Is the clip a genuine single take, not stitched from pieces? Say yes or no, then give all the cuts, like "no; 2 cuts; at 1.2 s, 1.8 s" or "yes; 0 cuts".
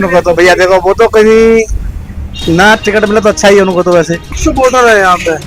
no; 1 cut; at 4.3 s